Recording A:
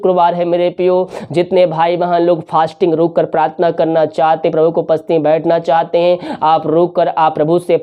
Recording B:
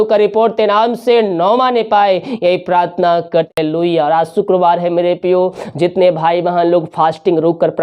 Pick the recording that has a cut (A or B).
B